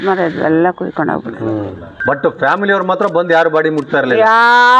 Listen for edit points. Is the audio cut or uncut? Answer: cut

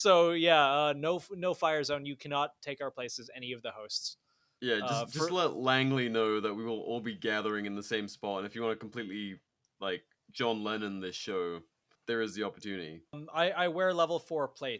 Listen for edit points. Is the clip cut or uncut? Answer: cut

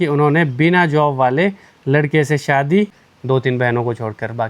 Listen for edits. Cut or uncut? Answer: cut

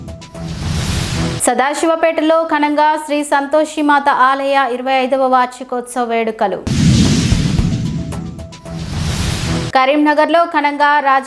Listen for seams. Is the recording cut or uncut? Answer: cut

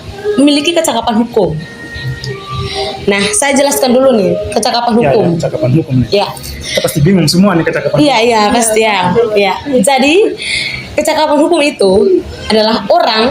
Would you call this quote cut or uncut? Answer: uncut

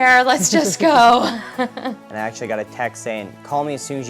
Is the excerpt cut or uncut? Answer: cut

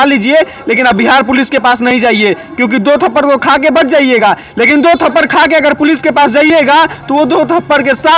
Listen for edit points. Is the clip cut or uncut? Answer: uncut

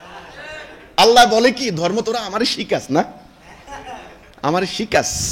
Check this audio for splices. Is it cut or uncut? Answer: uncut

